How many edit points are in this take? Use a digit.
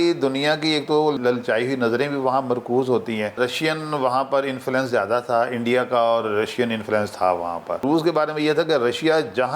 3